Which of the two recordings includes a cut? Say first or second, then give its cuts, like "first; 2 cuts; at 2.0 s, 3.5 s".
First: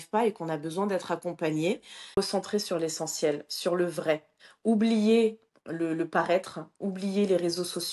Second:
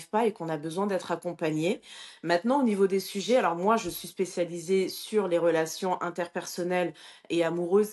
first; 1 cut; at 2.2 s